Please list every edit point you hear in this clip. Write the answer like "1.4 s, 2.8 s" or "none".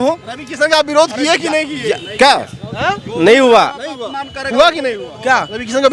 none